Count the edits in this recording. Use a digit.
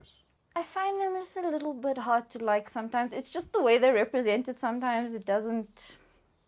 0